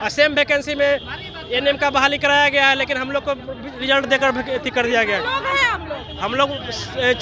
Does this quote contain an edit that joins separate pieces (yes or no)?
no